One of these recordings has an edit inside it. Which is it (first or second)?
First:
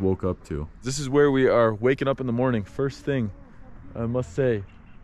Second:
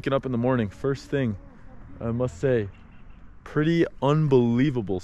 first